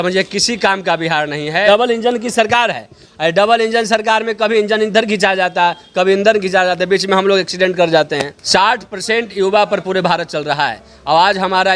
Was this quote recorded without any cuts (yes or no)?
no